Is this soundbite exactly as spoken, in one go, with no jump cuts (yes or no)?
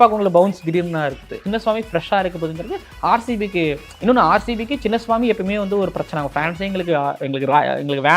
no